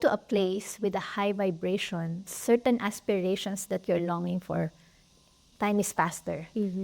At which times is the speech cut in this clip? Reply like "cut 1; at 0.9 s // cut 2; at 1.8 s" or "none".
cut 1; at 2.3 s // cut 2; at 5.4 s